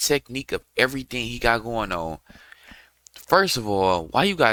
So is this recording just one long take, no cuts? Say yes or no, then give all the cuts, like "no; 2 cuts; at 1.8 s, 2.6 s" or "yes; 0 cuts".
yes; 0 cuts